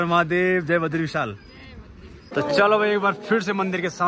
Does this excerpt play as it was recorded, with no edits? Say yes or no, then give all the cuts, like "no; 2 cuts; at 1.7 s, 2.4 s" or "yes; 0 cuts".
no; 1 cut; at 2.3 s